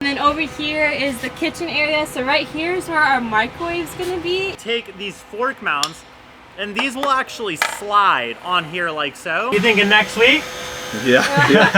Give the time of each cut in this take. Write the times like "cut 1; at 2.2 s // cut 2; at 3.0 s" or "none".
cut 1; at 4.6 s // cut 2; at 9.5 s